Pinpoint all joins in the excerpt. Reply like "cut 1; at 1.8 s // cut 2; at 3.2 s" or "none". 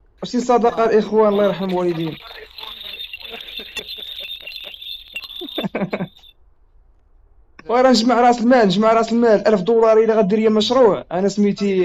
cut 1; at 7.5 s